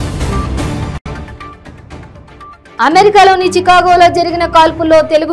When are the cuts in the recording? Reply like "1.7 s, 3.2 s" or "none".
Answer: 0.9 s